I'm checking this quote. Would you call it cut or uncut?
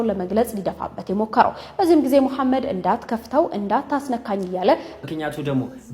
cut